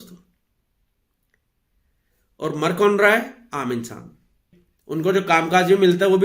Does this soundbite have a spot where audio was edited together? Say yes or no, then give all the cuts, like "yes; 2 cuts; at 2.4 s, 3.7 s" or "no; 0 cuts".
yes; 1 cut; at 4.6 s